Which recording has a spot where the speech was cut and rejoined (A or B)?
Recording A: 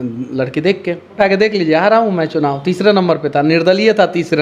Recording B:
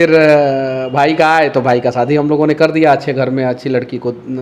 A